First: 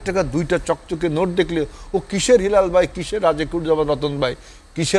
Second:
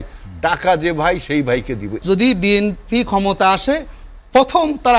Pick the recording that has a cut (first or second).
second